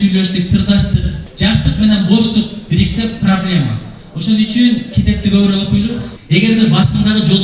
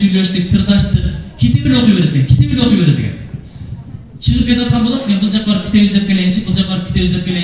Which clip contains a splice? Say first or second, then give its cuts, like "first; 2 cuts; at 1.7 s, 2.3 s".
first; 2 cuts; at 1.2 s, 6.1 s